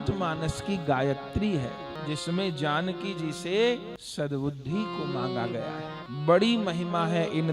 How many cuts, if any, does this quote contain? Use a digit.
3